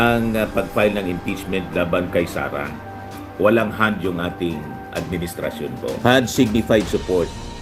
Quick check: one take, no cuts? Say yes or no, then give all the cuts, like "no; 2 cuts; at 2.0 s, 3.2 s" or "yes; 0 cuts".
no; 1 cut; at 5.9 s